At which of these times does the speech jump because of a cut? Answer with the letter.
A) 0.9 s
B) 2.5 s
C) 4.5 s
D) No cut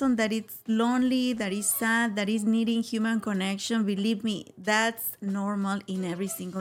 D